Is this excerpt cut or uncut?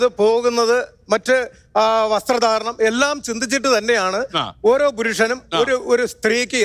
uncut